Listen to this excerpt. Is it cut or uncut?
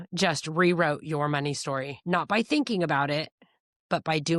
cut